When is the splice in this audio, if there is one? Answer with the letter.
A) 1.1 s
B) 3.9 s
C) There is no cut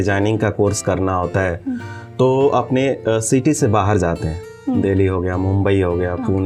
C